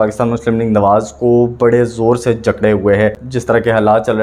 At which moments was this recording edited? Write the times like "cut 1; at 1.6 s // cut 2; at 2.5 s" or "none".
cut 1; at 3.3 s